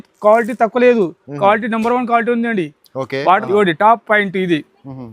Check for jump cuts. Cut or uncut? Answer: cut